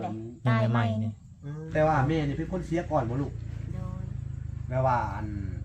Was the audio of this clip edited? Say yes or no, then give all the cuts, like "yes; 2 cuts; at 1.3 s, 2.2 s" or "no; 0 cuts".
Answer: yes; 1 cut; at 1.5 s